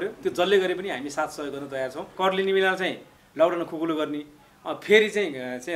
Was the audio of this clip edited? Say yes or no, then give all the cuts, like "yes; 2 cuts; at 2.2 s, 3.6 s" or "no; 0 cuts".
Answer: yes; 1 cut; at 2.1 s